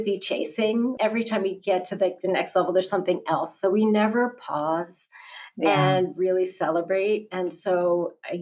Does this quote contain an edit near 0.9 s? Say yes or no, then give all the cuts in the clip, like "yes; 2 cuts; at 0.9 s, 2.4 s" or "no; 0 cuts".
yes; 1 cut; at 0.9 s